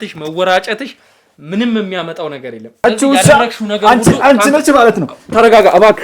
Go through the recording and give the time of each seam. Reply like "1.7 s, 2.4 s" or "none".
2.8 s